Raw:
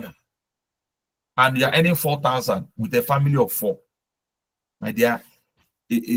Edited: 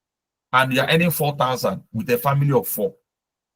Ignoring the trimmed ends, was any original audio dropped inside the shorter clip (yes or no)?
no